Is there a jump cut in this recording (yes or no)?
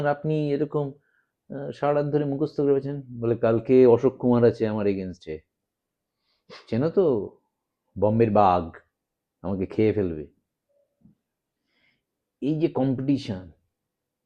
no